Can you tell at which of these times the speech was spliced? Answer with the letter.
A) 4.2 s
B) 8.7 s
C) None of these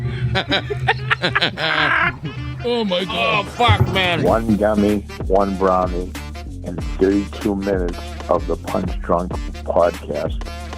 A